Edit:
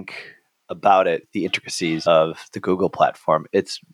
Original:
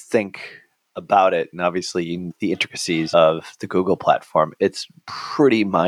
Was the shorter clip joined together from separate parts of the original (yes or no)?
yes